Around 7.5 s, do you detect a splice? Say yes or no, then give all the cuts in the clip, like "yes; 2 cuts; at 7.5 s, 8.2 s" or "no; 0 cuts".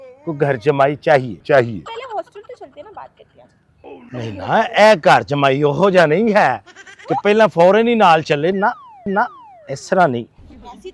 no; 1 cut; at 1.9 s